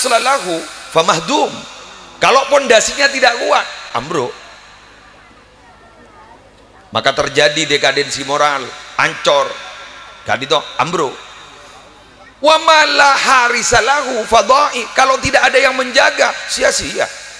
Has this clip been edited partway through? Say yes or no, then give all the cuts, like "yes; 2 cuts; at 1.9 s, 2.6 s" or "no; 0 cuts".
no; 0 cuts